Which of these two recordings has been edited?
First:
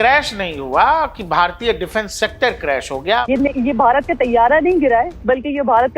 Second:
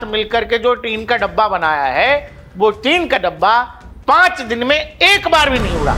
first; 1 cut; at 3.2 s

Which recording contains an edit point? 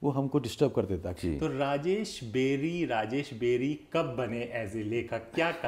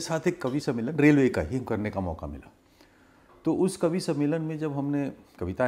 first; 1 cut; at 1.1 s

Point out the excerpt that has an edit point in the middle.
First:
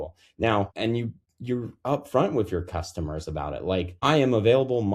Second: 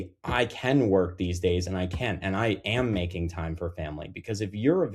first; 2 cuts; at 0.9 s, 4.0 s

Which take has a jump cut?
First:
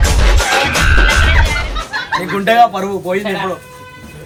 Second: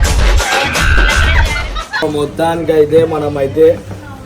second; 1 cut; at 2.0 s

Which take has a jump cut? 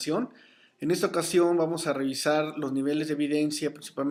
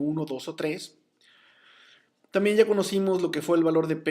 second; 1 cut; at 1.3 s

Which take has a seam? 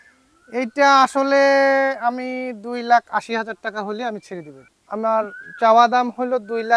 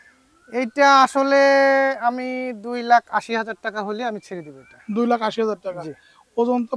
first; 1 cut; at 4.7 s

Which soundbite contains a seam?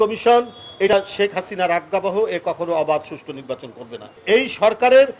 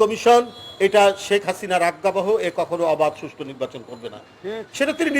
first; 2 cuts; at 0.9 s, 4.2 s

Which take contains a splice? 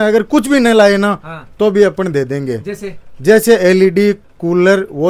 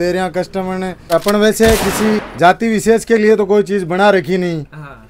second; 2 cuts; at 1.1 s, 2.3 s

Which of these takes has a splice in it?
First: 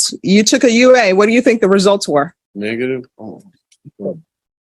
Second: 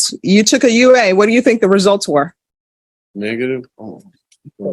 first; 1 cut; at 2.4 s

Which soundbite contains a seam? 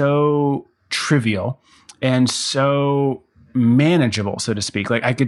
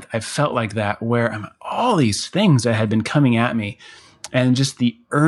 first; 1 cut; at 3.3 s

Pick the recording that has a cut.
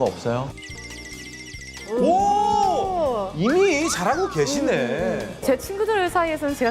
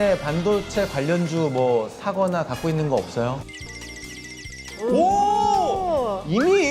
first; 1 cut; at 5.4 s

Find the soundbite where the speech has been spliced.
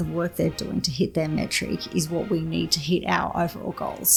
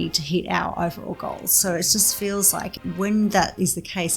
second; 1 cut; at 2.7 s

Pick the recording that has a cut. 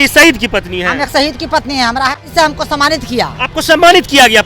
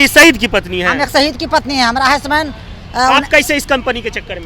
first; 1 cut; at 2.2 s

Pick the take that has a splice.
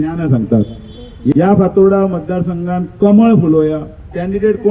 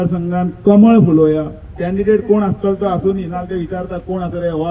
first; 1 cut; at 1.3 s

